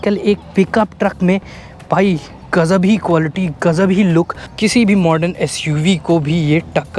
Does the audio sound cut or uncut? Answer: uncut